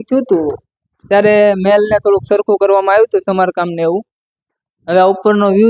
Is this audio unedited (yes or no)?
yes